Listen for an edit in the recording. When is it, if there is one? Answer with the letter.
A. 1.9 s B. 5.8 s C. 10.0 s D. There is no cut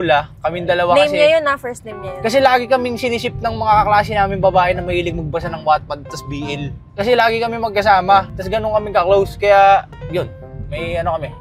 D